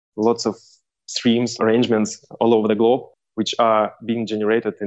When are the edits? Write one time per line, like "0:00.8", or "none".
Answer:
0:01.5